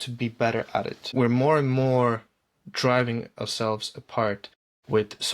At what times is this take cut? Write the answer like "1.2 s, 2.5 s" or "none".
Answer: 1.0 s

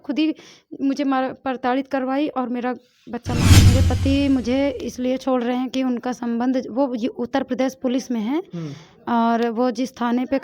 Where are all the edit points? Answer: 3.7 s

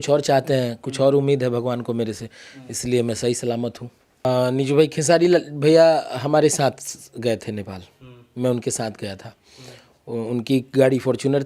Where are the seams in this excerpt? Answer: 4.2 s

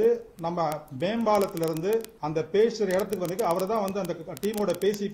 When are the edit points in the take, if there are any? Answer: 2.2 s

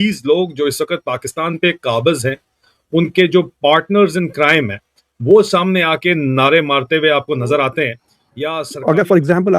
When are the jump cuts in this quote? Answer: 8.6 s

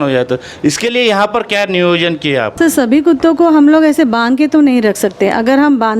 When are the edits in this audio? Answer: 2.5 s

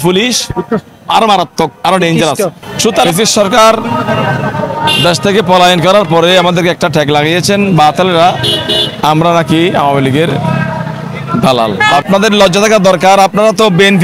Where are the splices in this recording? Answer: 3.0 s, 12.0 s

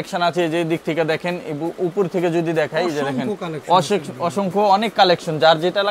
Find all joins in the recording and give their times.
none

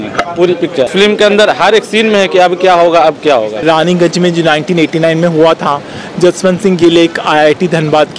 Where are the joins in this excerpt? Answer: 0.9 s, 3.6 s

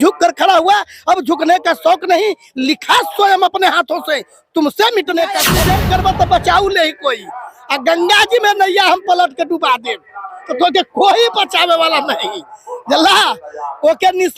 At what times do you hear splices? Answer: 5.5 s

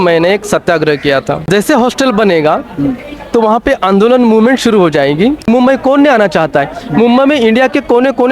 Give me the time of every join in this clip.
1.4 s, 5.5 s

